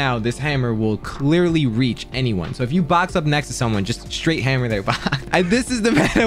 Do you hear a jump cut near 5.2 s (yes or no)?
yes